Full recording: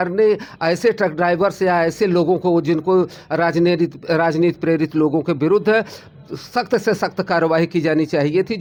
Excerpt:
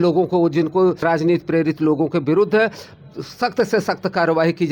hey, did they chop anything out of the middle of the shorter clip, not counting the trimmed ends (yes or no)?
yes